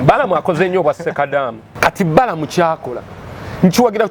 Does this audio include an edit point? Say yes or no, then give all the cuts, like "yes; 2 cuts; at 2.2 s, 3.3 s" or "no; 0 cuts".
yes; 1 cut; at 1.6 s